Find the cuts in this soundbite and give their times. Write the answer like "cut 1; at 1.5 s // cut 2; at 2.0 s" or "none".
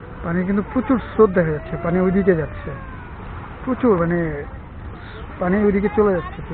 none